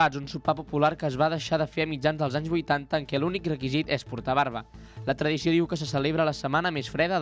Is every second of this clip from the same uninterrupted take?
yes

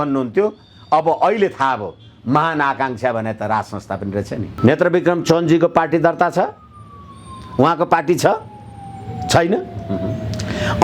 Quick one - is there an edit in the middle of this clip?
yes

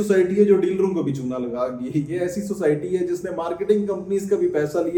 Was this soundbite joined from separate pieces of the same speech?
no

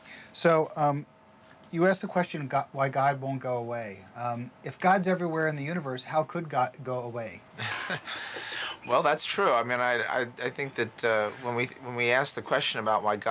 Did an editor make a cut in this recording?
yes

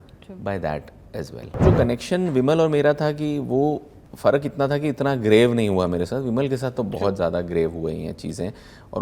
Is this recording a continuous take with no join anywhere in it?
no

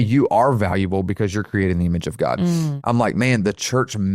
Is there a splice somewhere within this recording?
yes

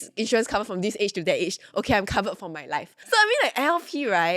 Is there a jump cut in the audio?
yes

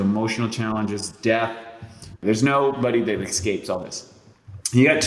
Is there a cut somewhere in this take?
yes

